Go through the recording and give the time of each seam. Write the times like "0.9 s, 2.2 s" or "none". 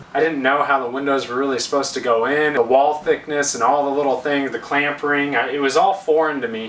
2.5 s